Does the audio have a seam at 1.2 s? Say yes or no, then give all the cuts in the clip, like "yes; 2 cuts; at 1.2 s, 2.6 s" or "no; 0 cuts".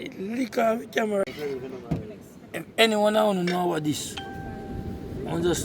yes; 1 cut; at 1.2 s